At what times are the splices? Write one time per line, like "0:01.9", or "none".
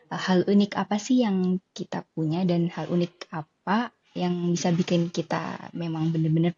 none